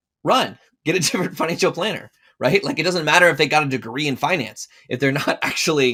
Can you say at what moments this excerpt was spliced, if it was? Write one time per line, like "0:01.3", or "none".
none